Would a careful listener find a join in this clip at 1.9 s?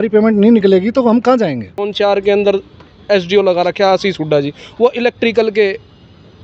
yes; 1 cut; at 1.9 s

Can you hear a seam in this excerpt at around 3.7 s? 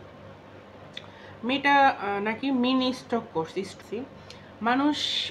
yes; 1 cut; at 3.7 s

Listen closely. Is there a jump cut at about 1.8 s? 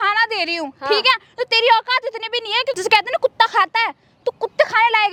no; 0 cuts

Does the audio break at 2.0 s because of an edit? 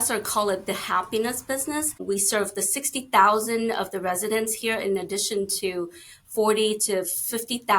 yes; 1 cut; at 2.0 s

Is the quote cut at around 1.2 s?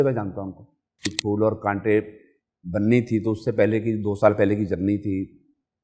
yes; 1 cut; at 1.2 s

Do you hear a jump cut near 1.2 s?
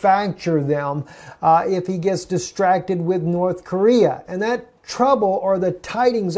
no; 0 cuts

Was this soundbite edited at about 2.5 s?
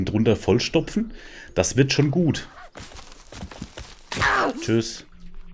yes; 1 cut; at 2.5 s

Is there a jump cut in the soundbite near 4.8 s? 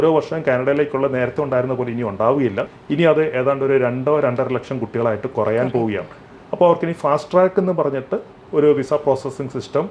no; 1 cut; at 2.7 s

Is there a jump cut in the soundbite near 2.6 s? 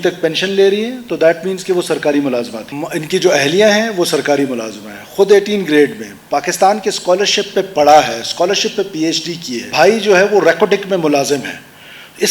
yes; 2 cuts; at 2.6 s, 9.6 s

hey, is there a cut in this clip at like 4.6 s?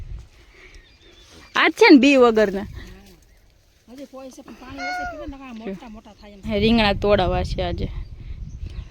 no; 1 cut; at 6.2 s

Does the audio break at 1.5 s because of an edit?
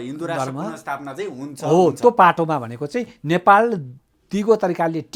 no; 0 cuts

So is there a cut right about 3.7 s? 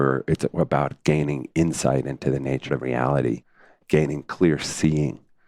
yes; 2 cuts; at 2.7 s, 3.7 s

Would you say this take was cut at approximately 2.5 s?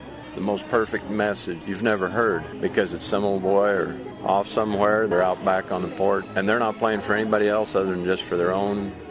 yes; 5 cuts; at 1.6 s, 2.5 s, 4.1 s, 5.1 s, 6.3 s

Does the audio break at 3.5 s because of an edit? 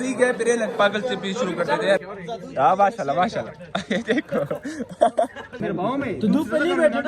no; 2 cuts; at 2.0 s, 5.6 s

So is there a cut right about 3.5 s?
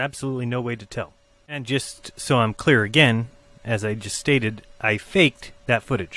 no; 1 cut; at 4.7 s

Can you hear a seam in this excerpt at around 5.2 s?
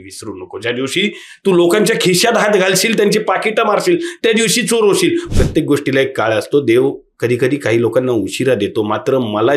yes; 1 cut; at 5.2 s

